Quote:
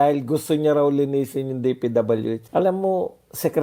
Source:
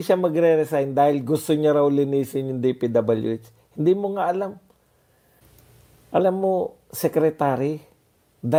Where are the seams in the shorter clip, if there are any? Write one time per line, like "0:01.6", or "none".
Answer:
0:02.4